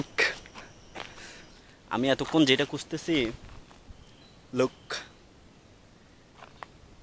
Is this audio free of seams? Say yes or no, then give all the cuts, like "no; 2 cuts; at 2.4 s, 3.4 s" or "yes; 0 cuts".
no; 1 cut; at 1.5 s